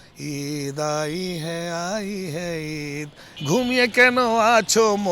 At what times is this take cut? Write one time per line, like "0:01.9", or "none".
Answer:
0:03.3